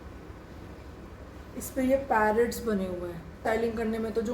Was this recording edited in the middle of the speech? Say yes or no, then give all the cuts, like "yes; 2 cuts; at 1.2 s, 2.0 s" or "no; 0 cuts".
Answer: yes; 1 cut; at 3.4 s